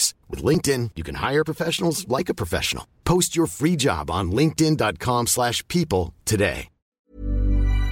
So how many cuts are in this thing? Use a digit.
1